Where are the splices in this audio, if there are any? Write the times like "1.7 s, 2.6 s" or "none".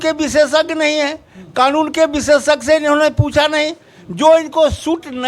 none